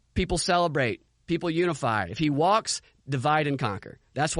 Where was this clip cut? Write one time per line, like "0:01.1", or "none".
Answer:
none